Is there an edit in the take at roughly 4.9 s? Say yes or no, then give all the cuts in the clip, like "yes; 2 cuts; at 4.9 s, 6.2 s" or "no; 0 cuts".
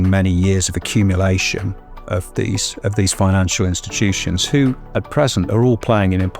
no; 0 cuts